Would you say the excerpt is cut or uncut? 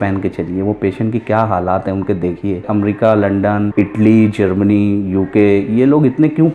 cut